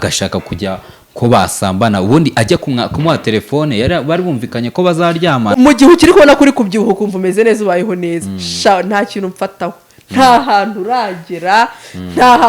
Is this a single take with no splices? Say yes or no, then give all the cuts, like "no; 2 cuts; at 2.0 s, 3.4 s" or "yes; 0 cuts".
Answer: no; 1 cut; at 5.5 s